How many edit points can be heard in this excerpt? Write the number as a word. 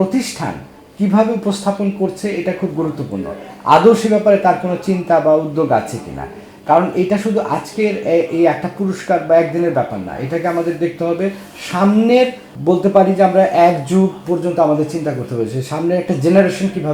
one